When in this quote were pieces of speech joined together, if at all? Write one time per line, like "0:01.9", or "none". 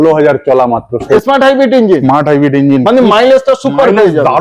0:01.0